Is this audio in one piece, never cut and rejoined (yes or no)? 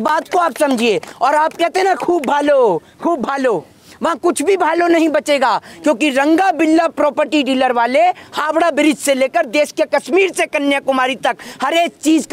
yes